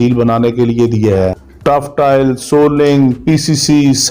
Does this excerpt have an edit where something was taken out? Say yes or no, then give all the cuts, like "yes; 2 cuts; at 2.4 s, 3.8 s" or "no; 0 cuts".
yes; 1 cut; at 1.5 s